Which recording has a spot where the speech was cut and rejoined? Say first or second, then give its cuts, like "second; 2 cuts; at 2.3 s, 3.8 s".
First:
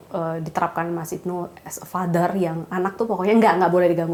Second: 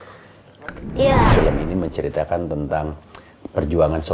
second; 1 cut; at 1.3 s